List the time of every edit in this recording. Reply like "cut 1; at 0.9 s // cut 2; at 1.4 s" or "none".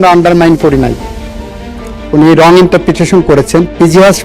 none